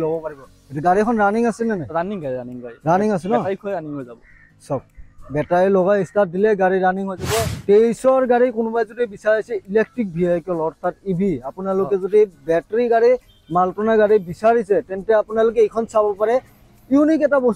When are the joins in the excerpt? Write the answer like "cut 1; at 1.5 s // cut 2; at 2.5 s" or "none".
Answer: cut 1; at 7.6 s